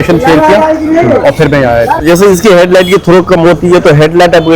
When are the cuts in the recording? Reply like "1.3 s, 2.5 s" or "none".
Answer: 2.0 s